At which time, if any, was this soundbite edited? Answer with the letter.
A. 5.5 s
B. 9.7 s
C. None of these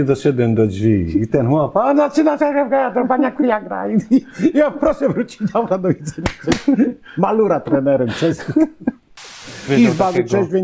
B